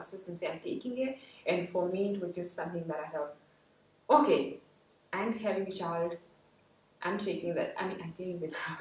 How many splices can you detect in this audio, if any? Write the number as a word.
zero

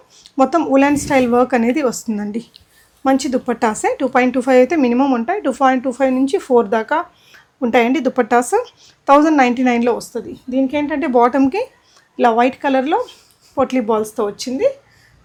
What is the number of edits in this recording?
zero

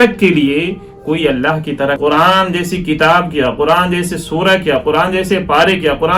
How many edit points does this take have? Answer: one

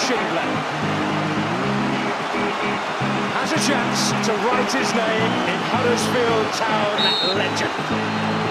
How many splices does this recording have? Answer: zero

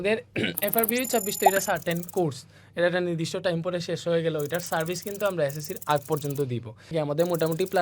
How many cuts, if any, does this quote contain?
one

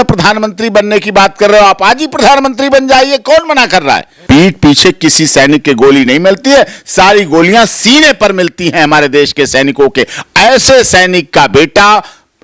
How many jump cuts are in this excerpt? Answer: one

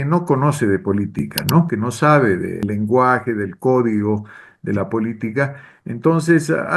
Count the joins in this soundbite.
one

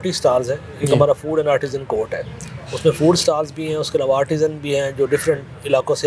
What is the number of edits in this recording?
zero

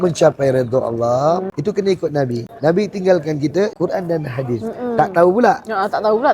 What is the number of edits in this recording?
three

